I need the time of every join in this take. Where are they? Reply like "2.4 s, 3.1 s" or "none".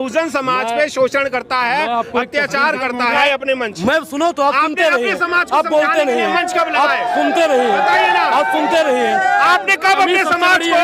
3.2 s